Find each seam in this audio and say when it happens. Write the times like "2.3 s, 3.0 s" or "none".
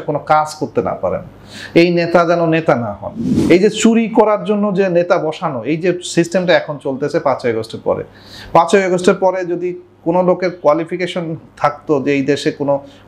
3.3 s